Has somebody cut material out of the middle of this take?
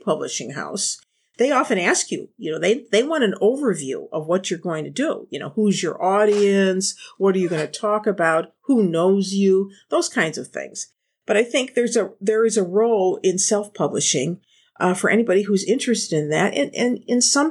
no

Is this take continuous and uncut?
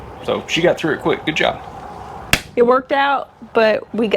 yes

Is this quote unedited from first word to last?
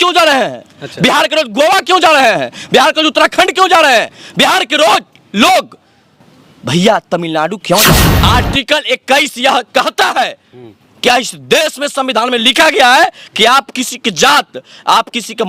no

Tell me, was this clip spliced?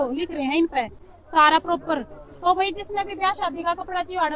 no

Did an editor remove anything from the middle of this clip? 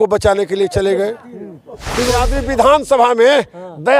yes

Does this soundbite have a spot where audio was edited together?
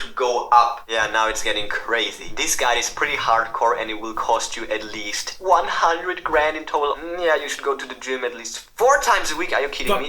yes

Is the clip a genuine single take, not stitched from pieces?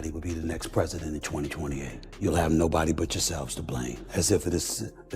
no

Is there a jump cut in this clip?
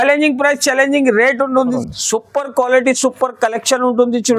yes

